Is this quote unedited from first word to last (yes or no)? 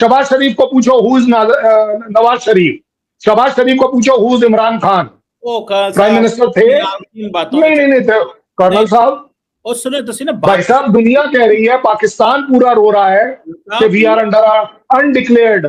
yes